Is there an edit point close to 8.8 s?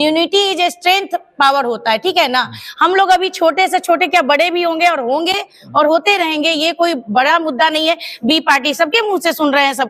no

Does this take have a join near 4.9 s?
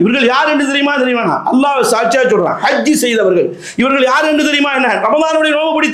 no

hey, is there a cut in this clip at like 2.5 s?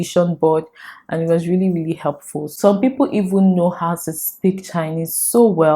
yes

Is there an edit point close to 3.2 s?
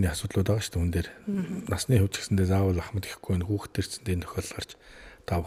no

